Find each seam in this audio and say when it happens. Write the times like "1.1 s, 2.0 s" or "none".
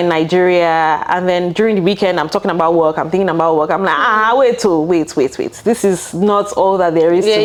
none